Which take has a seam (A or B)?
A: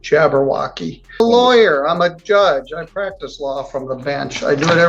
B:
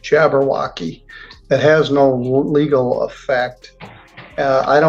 A